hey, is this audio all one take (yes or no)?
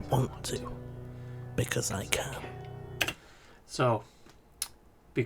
yes